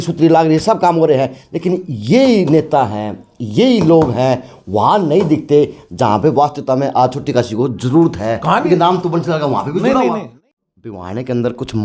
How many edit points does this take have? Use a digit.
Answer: 1